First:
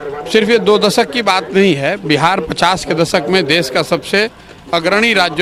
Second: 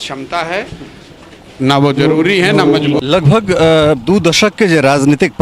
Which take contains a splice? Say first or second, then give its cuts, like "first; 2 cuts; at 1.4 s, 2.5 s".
second; 1 cut; at 3.0 s